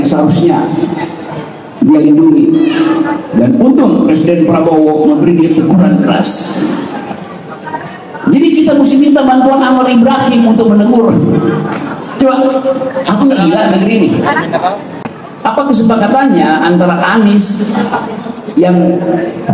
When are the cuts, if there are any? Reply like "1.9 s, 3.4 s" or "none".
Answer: 15.0 s